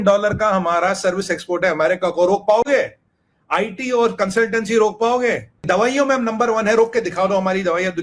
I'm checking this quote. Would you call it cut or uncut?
cut